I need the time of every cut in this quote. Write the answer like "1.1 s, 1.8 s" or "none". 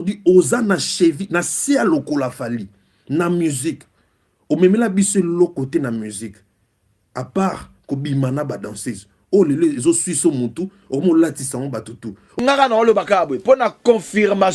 12.4 s